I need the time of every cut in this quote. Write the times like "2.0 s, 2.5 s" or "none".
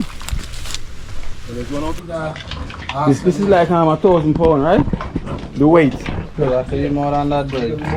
2.0 s